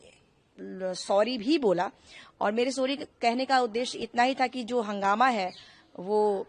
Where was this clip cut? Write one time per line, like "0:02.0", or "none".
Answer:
none